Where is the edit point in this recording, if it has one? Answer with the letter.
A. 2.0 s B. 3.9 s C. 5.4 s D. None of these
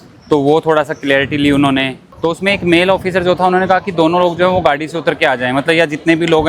D